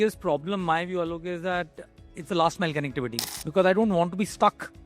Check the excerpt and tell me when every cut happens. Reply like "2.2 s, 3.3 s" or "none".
3.2 s

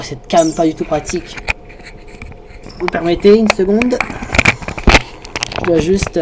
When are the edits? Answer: 4.1 s

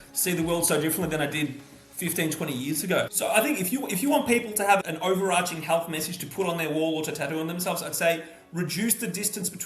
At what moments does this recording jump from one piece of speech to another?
3.1 s

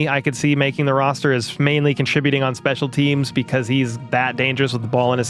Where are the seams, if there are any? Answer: none

